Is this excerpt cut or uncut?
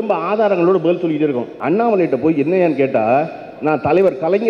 cut